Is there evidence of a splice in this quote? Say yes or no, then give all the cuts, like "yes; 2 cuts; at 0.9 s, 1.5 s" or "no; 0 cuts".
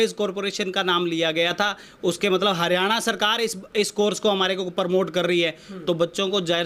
no; 0 cuts